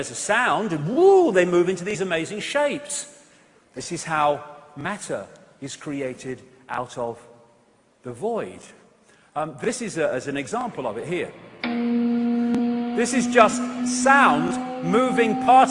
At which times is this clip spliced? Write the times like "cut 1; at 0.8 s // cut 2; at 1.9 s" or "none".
cut 1; at 9.2 s